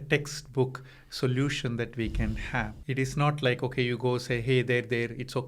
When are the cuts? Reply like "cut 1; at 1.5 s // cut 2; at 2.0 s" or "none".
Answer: cut 1; at 2.8 s